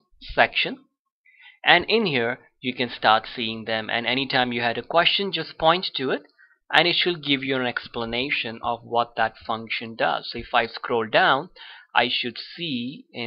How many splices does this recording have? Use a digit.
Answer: 0